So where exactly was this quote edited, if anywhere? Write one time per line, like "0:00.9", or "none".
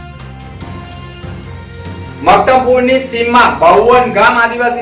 none